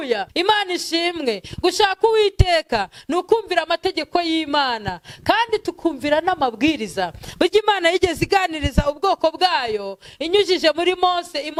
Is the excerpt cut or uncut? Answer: uncut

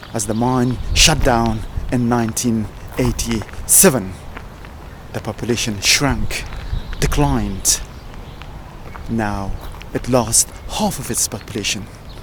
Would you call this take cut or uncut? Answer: uncut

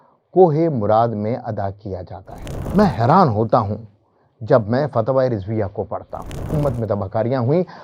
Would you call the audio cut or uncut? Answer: cut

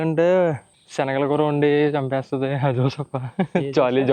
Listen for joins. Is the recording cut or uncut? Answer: uncut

